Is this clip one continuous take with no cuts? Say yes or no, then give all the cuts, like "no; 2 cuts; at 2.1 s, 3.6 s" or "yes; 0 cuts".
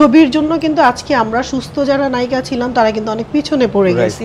yes; 0 cuts